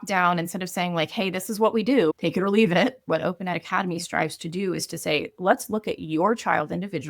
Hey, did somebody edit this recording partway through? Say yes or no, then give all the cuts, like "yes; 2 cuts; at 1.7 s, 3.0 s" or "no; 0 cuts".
yes; 1 cut; at 3.0 s